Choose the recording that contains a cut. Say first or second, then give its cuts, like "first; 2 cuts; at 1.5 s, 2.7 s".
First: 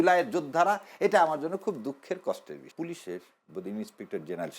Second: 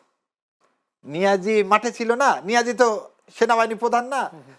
first; 1 cut; at 2.7 s